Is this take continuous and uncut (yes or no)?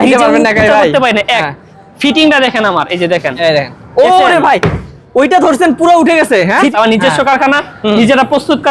no